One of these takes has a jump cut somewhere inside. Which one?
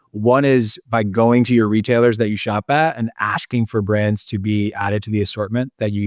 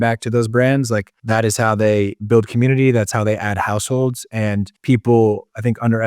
second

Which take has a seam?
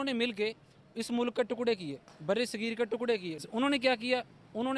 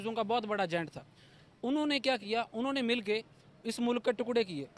first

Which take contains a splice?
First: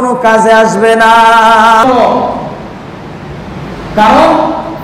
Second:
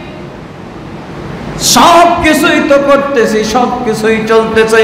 first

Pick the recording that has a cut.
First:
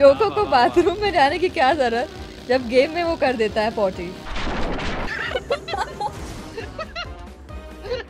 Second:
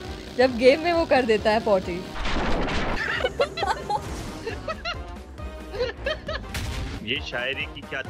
second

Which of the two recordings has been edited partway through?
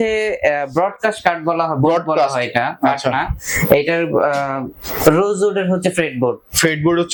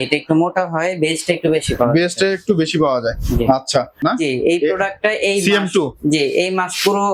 second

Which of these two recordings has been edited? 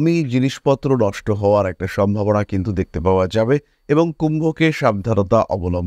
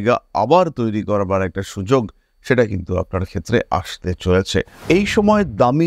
second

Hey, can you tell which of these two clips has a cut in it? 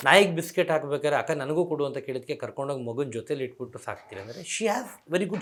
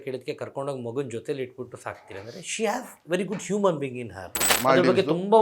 second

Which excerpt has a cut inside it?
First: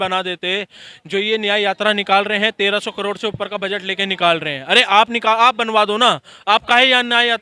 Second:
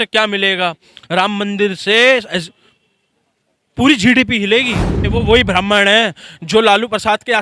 second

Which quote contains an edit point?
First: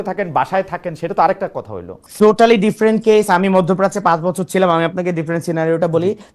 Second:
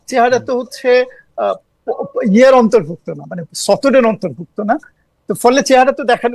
first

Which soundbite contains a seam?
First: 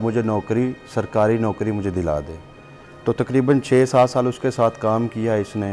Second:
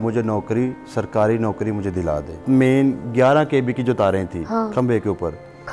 second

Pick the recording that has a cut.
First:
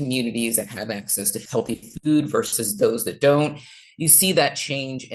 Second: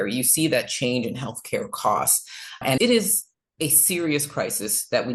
first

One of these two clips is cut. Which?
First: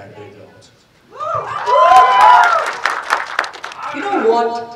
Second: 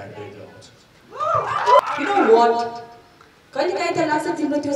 second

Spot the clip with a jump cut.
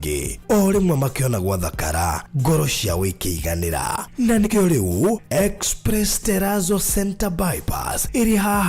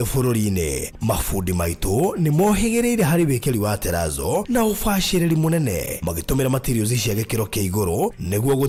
first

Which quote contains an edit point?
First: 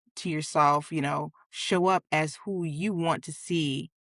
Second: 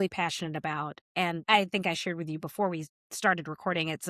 second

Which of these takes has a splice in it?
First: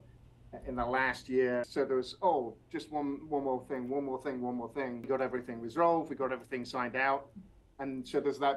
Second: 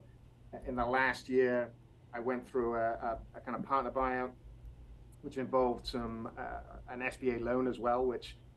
first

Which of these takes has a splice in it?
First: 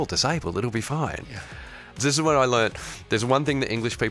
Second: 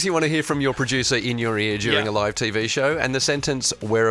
first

